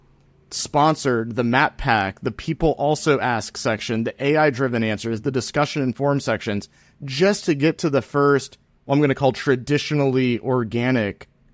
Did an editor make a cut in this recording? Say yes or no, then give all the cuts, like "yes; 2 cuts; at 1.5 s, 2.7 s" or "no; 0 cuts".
no; 0 cuts